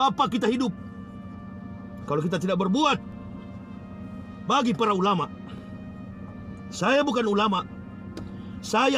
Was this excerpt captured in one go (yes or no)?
yes